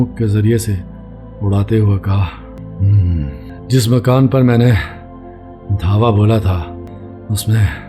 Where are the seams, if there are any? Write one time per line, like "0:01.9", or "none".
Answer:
0:02.5
0:03.5
0:06.9